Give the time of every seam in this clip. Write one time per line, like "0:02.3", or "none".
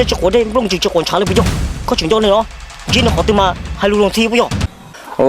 0:00.9